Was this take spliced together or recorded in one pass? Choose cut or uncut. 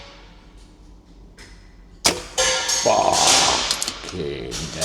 uncut